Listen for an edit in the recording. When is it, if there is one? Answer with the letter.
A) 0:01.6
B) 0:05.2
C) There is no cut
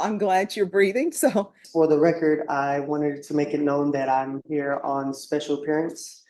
A